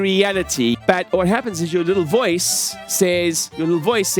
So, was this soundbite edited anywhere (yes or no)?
yes